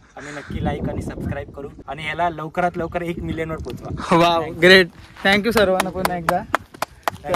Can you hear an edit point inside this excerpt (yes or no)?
yes